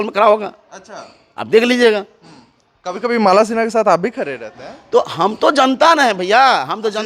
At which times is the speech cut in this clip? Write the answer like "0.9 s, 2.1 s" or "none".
none